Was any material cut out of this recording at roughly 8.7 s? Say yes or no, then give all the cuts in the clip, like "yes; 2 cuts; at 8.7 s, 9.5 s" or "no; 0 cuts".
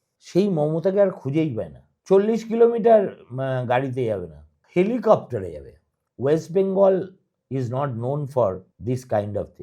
yes; 1 cut; at 8.7 s